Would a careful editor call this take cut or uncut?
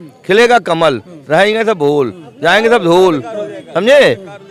uncut